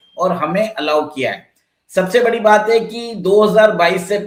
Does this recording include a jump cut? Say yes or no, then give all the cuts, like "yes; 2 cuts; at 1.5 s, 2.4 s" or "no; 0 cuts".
no; 0 cuts